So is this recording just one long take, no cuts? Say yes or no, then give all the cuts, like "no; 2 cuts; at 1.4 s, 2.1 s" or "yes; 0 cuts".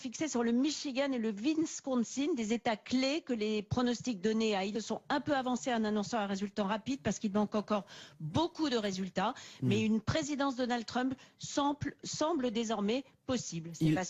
yes; 0 cuts